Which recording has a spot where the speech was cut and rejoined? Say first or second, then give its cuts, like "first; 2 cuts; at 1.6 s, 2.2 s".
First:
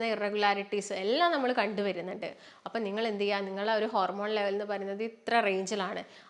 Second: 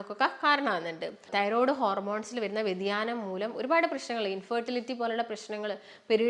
second; 1 cut; at 1.2 s